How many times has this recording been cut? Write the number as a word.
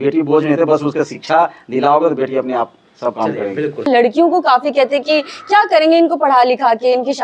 one